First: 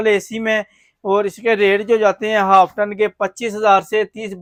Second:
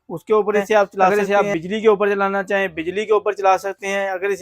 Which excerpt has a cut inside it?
second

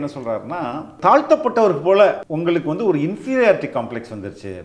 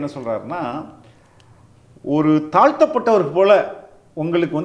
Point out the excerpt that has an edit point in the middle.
first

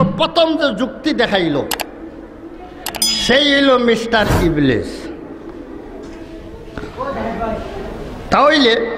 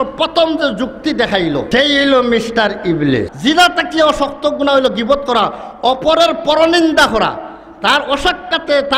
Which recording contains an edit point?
second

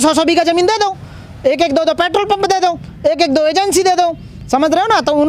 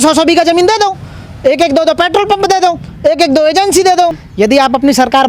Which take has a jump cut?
second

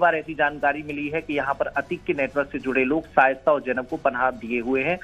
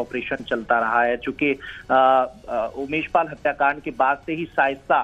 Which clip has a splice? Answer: first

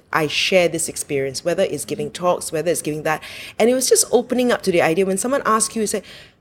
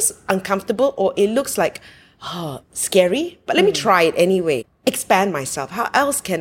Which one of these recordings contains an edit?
second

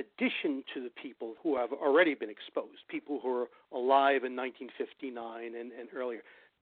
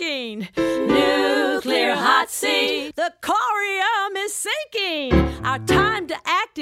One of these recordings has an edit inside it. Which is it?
first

